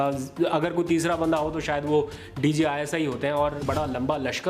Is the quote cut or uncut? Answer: cut